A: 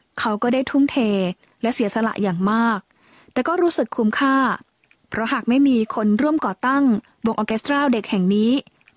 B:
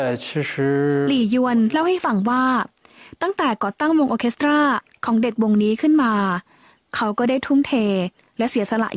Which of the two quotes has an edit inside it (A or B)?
B